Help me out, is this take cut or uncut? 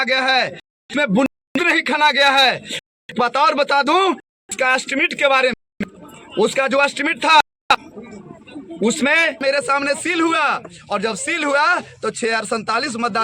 cut